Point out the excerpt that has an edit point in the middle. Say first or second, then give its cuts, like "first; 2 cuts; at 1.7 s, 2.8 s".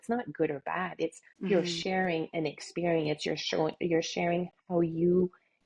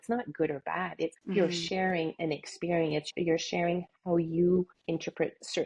second; 3 cuts; at 1.2 s, 3.1 s, 4.8 s